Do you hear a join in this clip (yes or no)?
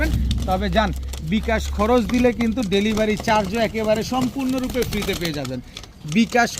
no